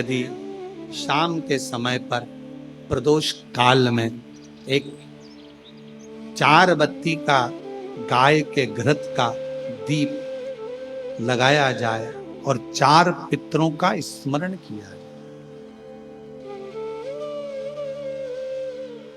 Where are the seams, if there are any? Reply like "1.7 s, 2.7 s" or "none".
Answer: 15.0 s, 16.2 s, 17.4 s